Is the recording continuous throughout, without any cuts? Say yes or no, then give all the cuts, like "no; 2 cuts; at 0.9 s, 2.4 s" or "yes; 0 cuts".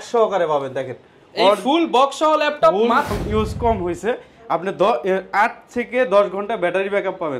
no; 1 cut; at 3.1 s